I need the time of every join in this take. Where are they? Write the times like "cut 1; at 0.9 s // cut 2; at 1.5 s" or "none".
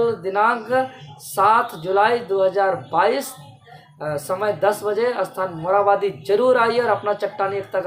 none